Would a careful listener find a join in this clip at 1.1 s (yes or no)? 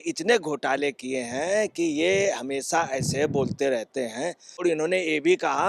no